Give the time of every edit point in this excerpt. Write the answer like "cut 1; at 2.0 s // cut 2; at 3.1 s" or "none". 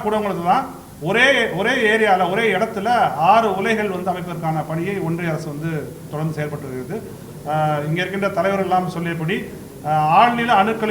none